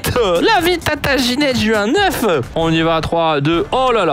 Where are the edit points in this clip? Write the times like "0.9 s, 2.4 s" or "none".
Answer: 2.5 s